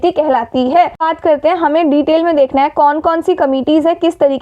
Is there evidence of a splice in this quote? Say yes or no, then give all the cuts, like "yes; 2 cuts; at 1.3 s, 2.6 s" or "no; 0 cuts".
yes; 1 cut; at 1.0 s